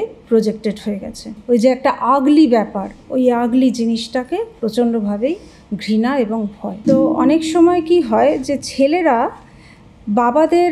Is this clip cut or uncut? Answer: cut